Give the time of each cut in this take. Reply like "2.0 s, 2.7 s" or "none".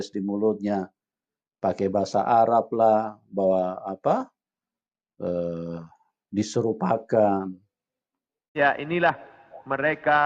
8.5 s